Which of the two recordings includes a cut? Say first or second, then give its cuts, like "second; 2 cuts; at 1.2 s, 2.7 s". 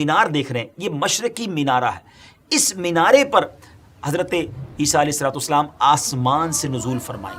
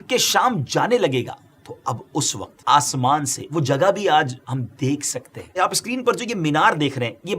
second; 2 cuts; at 2.6 s, 5.6 s